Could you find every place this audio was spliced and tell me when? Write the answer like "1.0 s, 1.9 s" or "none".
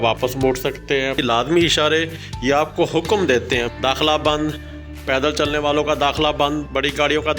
1.2 s, 3.7 s